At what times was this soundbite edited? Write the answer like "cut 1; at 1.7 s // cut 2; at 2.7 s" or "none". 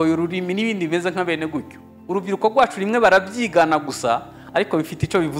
none